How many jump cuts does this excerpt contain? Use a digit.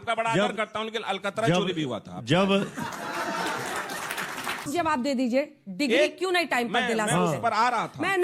2